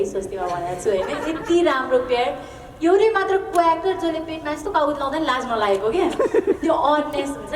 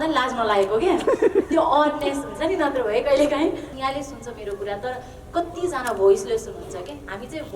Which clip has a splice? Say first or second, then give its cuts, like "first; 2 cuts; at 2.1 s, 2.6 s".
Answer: second; 1 cut; at 3.7 s